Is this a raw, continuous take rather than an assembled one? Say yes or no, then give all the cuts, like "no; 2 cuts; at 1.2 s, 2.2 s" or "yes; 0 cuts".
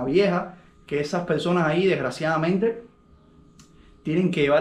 yes; 0 cuts